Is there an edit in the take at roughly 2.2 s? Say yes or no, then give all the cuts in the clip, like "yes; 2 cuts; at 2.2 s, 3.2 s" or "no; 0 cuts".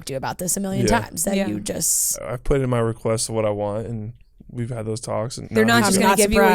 yes; 2 cuts; at 2.2 s, 5.4 s